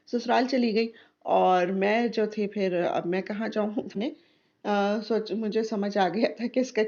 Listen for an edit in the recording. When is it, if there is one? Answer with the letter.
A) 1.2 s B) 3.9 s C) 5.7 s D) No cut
B